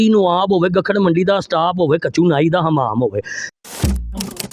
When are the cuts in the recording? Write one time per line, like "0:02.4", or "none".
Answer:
0:03.5

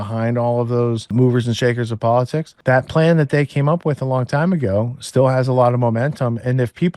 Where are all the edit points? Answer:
0:01.1
0:02.5

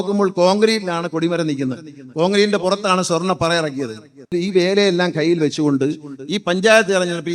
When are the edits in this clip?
0:04.3

